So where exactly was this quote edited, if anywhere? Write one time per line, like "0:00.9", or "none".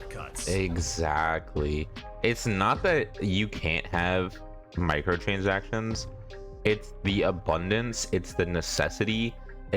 none